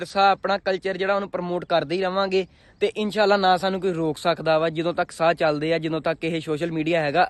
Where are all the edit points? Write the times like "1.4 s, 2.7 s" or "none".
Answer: none